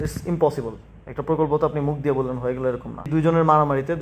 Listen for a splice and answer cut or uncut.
cut